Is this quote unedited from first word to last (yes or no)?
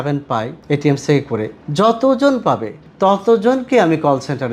yes